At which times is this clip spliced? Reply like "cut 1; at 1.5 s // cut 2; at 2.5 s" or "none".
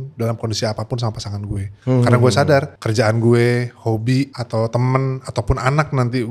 cut 1; at 1.7 s // cut 2; at 2.8 s // cut 3; at 4.4 s